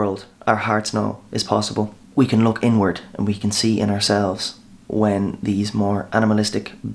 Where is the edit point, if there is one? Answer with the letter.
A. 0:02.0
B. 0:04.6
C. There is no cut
A